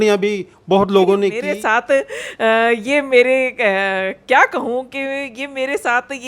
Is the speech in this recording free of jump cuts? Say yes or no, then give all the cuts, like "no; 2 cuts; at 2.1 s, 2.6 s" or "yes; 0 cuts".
no; 1 cut; at 1.5 s